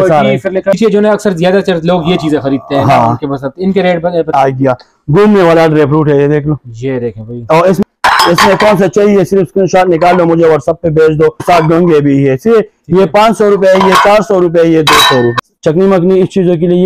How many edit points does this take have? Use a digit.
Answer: 5